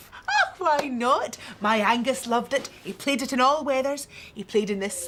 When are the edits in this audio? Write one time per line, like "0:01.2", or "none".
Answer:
none